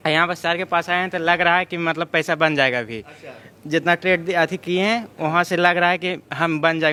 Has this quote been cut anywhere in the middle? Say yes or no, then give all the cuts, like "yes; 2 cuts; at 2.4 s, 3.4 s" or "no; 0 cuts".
no; 0 cuts